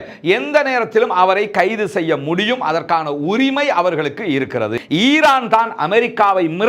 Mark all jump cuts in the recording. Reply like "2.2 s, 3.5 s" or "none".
4.8 s